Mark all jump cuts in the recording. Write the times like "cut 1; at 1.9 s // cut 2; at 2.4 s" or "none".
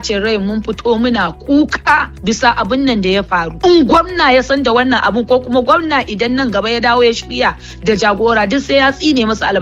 cut 1; at 3.5 s